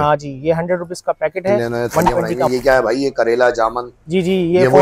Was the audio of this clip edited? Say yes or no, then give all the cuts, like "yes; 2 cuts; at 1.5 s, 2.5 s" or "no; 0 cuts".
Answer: yes; 1 cut; at 2.5 s